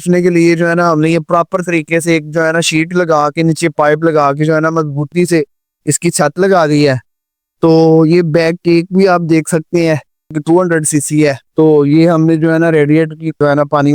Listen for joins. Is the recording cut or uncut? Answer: cut